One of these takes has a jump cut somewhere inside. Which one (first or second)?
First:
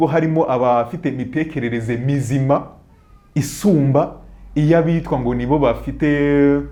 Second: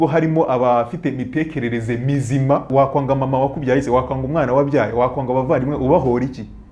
second